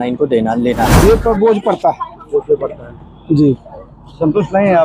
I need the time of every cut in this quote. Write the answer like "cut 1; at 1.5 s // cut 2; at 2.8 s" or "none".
cut 1; at 1.0 s